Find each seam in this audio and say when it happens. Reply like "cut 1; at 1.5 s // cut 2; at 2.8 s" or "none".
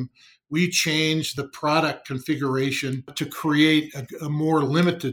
cut 1; at 1.3 s // cut 2; at 3.1 s